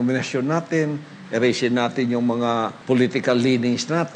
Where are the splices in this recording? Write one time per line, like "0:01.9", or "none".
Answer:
0:02.7